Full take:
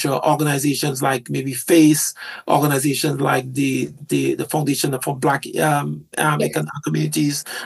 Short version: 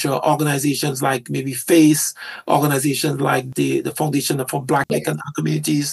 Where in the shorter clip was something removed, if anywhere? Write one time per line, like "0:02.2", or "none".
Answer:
0:03.5
0:04.9